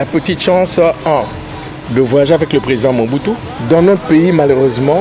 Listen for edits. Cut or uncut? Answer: cut